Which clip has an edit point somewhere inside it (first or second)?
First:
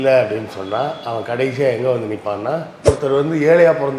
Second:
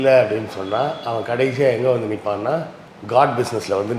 first